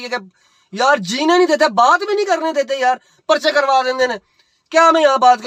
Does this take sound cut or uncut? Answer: uncut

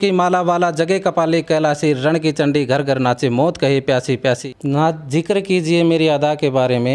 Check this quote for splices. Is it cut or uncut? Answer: cut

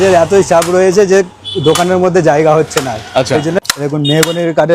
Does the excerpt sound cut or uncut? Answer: cut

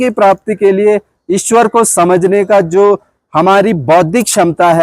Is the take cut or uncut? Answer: uncut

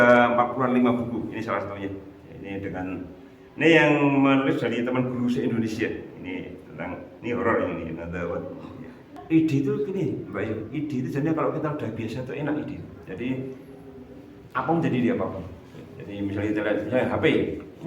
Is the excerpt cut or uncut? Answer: cut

